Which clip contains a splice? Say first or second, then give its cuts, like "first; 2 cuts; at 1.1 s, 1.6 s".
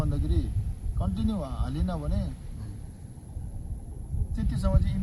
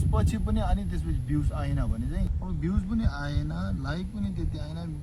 second; 1 cut; at 2.3 s